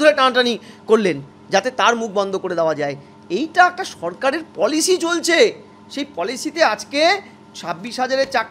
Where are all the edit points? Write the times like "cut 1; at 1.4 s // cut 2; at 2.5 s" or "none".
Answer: none